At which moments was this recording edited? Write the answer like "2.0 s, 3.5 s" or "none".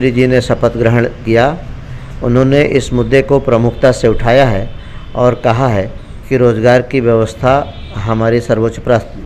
none